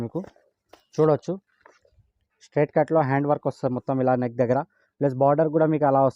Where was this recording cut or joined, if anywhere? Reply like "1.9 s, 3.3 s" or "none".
none